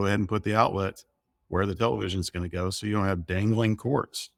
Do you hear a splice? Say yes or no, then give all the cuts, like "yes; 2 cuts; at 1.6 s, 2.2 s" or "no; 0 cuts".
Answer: no; 0 cuts